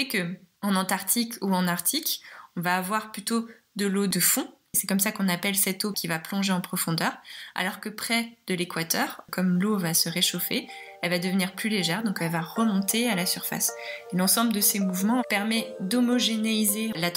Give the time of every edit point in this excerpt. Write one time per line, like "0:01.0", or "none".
none